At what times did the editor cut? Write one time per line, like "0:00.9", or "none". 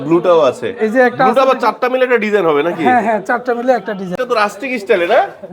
0:04.1